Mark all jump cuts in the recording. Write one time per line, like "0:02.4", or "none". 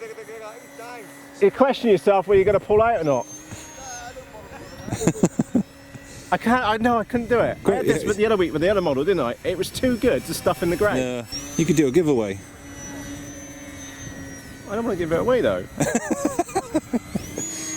0:11.3